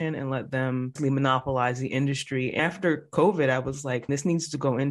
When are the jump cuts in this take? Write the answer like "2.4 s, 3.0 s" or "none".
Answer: 1.0 s, 2.6 s, 4.1 s